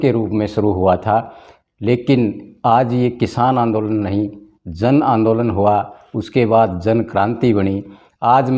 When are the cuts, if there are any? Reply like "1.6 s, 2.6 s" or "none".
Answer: none